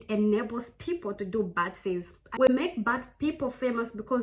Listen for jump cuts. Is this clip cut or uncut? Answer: cut